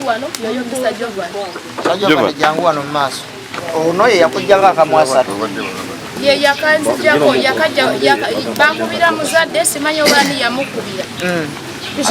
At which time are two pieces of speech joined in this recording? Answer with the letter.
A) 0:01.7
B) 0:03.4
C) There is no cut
B